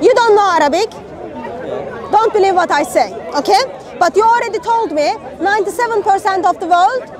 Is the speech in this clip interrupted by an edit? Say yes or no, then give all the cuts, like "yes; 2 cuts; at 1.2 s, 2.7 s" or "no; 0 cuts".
no; 0 cuts